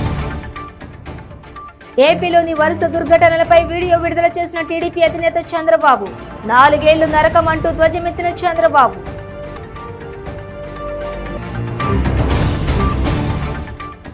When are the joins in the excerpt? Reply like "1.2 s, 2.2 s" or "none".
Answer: 1.2 s